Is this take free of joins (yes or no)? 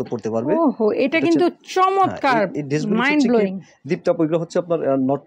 yes